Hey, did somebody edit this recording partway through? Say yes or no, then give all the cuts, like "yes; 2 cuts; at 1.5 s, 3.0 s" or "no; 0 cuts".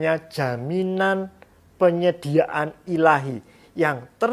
no; 0 cuts